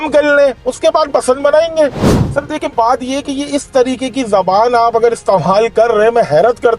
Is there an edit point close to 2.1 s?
yes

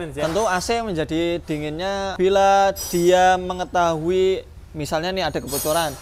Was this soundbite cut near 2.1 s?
yes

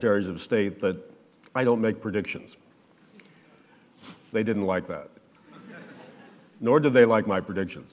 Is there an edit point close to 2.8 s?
no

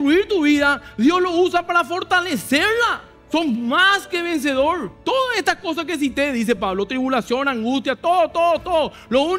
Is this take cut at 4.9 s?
yes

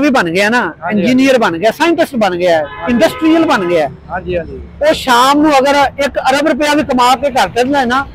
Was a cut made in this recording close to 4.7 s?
no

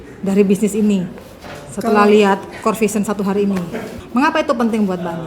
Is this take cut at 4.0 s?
yes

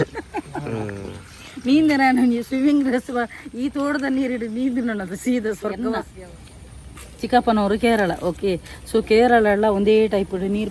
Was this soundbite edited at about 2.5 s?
no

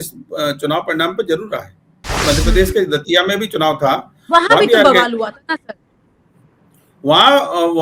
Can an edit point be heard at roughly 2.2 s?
yes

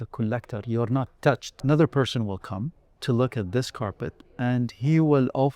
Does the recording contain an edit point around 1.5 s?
yes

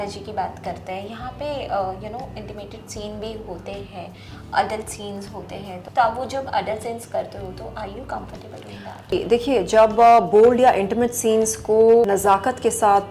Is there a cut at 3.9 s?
no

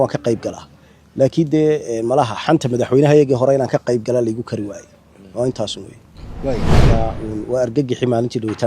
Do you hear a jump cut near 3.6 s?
no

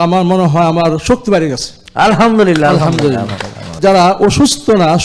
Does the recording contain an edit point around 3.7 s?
yes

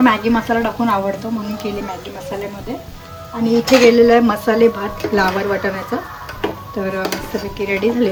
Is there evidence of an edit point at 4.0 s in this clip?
no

